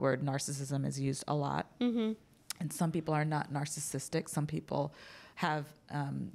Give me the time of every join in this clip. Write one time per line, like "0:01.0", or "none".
none